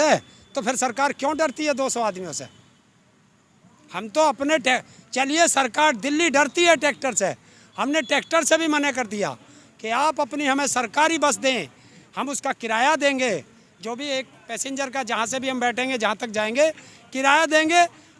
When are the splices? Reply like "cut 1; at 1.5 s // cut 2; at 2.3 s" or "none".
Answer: none

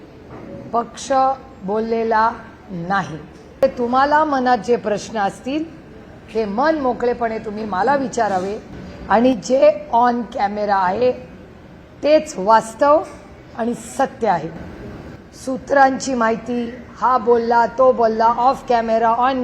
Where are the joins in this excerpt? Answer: cut 1; at 3.6 s

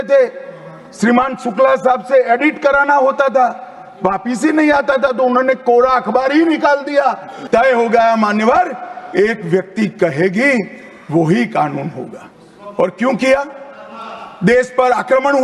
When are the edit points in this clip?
cut 1; at 7.4 s

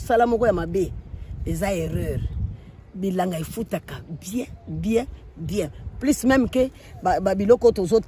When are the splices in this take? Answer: none

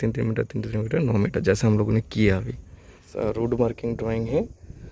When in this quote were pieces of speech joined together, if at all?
cut 1; at 3.1 s

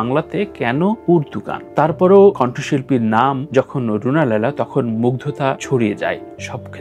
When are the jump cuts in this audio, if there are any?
none

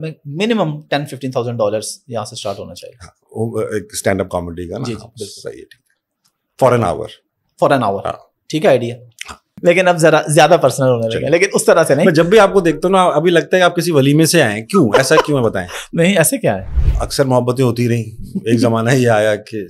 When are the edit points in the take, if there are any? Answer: cut 1; at 9.5 s // cut 2; at 16.7 s

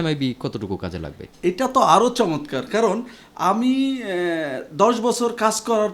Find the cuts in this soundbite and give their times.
none

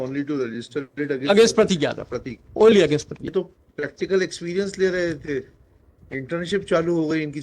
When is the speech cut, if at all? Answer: cut 1; at 3.3 s

